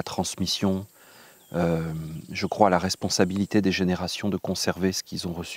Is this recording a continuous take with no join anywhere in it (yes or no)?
yes